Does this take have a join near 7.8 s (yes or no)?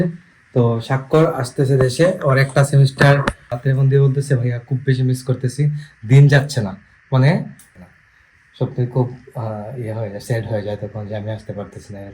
yes